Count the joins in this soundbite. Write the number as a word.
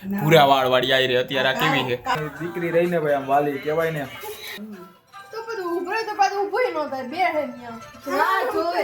two